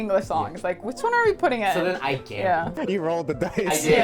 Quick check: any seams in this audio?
yes; 1 cut; at 2.8 s

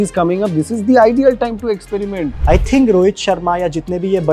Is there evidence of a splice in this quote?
yes; 1 cut; at 2.3 s

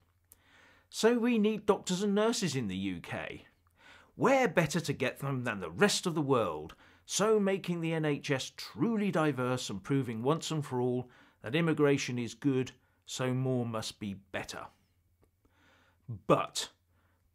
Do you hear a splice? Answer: no; 0 cuts

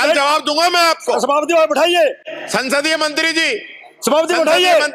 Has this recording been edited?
no; 0 cuts

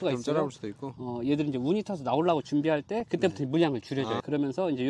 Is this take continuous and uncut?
no; 1 cut; at 1.0 s

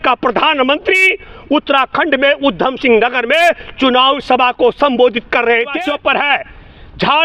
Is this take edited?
yes; 1 cut; at 5.8 s

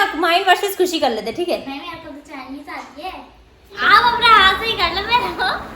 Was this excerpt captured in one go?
no; 1 cut; at 3.8 s

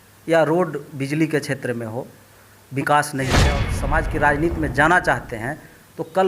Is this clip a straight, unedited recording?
no; 1 cut; at 3.7 s

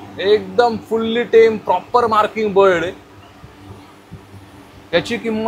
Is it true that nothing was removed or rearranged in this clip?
yes; 0 cuts

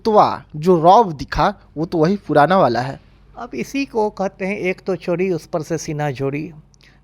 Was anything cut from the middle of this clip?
no; 0 cuts

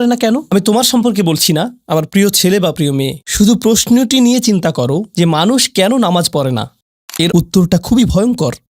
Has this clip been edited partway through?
yes; 1 cut; at 7.3 s

